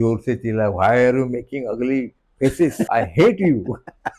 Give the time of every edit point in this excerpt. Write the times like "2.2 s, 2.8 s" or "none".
2.9 s